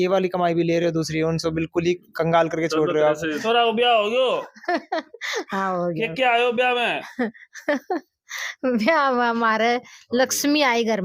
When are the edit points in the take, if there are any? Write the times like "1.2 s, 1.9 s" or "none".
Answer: 3.3 s